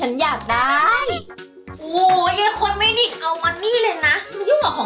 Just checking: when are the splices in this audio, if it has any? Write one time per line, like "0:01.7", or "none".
none